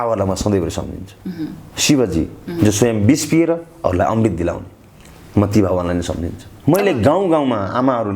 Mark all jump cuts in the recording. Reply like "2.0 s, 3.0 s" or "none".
6.5 s